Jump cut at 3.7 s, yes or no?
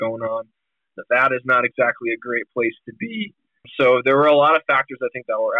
yes